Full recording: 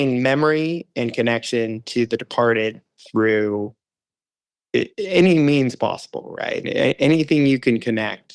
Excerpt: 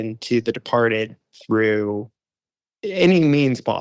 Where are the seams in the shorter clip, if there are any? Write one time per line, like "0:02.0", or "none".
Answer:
0:02.8